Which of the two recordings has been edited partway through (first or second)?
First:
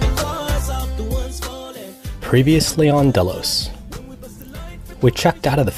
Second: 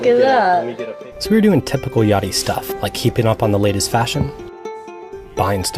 first